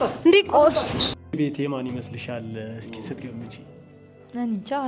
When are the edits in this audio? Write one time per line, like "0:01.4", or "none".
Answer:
0:01.3